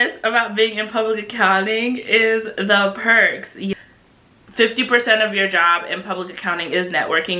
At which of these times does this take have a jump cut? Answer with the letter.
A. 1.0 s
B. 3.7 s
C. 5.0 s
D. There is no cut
B